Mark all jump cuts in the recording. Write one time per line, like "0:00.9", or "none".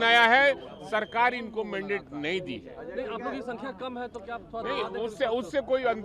none

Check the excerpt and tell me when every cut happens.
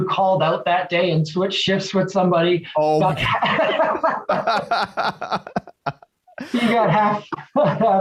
none

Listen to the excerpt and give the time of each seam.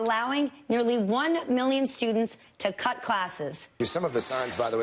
0:03.5

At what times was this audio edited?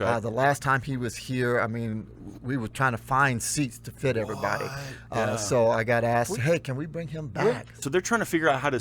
0:07.8

